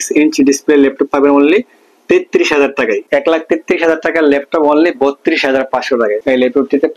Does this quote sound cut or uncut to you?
cut